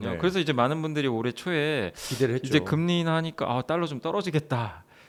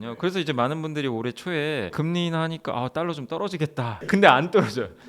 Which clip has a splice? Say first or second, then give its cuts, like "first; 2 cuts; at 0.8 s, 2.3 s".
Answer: second; 2 cuts; at 1.9 s, 4.0 s